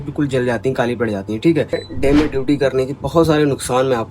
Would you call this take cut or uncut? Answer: cut